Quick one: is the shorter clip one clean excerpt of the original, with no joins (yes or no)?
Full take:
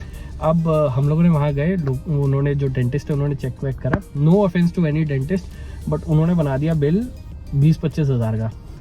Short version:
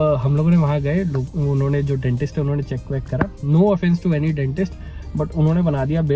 yes